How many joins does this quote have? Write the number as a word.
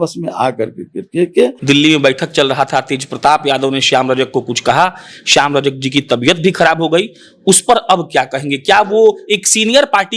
one